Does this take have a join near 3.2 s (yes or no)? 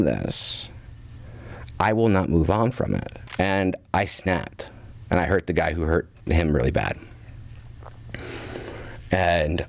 yes